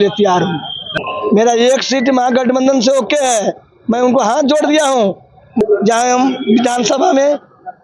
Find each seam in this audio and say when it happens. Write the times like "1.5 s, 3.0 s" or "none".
1.0 s, 5.6 s